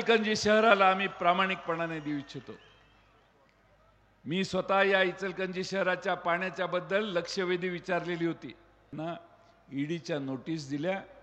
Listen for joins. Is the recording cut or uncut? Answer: cut